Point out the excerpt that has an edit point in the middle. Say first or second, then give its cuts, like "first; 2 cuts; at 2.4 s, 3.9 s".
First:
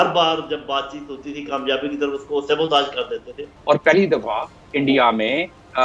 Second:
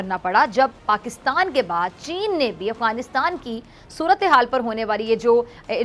first; 1 cut; at 3.5 s